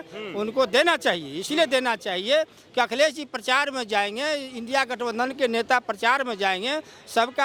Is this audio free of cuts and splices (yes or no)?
yes